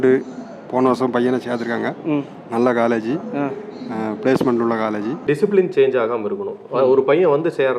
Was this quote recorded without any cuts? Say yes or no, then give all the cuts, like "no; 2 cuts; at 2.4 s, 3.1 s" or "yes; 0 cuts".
no; 1 cut; at 5.2 s